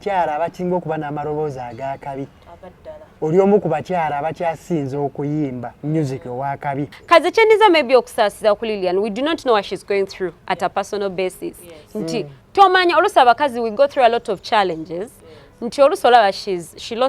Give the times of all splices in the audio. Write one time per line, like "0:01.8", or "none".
0:06.9